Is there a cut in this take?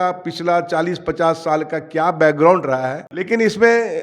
yes; 1 cut; at 3.0 s

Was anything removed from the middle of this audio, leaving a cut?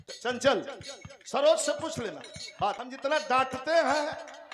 yes; 1 cut; at 2.8 s

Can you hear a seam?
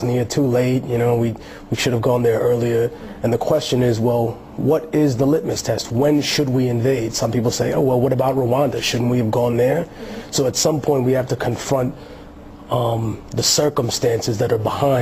yes; 1 cut; at 13.0 s

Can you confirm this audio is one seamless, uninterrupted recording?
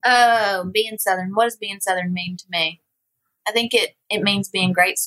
yes; 0 cuts

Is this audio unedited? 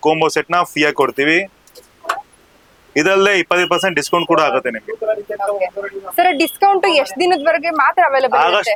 yes; 0 cuts

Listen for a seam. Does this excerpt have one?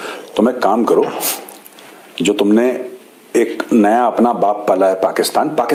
no; 0 cuts

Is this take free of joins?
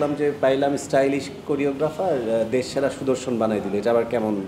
yes; 0 cuts

